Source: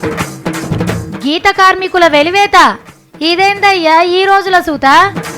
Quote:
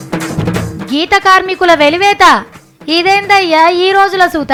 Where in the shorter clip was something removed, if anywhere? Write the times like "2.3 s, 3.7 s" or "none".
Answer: none